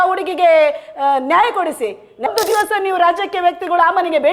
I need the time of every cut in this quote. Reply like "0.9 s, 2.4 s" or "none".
2.2 s